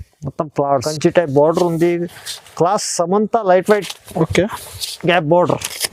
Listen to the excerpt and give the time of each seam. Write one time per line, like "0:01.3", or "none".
0:00.9